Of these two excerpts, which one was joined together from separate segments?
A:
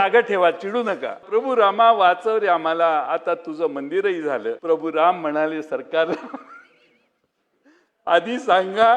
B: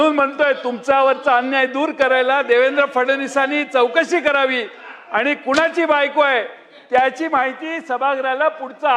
A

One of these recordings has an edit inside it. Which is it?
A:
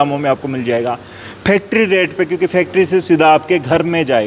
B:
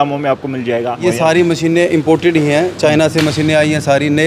B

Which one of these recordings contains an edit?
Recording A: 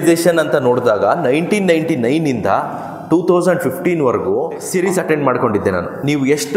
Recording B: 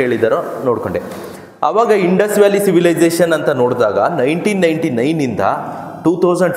A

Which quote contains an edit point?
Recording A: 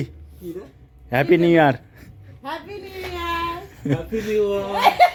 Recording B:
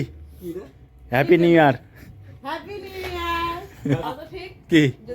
B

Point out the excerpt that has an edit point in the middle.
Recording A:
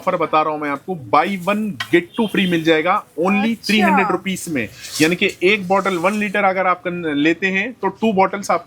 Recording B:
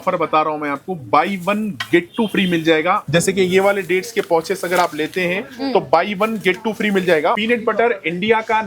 B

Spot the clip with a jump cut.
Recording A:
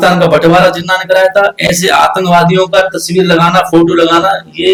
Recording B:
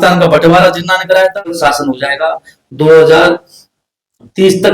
B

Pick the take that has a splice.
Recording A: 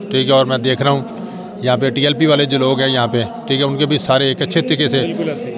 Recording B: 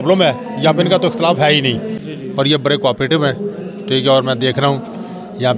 B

